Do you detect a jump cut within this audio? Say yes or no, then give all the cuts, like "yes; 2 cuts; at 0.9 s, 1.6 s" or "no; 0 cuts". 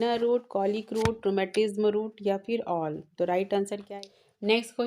yes; 1 cut; at 3.9 s